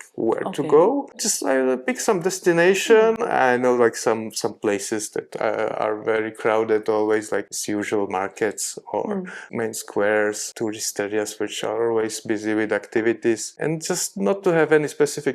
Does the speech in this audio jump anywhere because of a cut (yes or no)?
yes